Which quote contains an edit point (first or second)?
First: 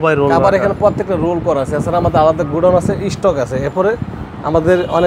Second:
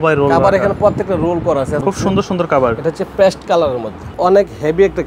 second